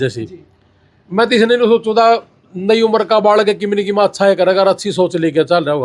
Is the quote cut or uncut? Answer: uncut